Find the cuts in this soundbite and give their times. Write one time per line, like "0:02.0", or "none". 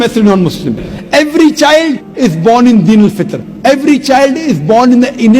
0:00.9